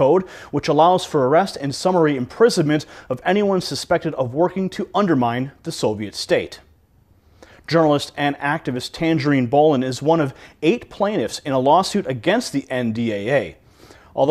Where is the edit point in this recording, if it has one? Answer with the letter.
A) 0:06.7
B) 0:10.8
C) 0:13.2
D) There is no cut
D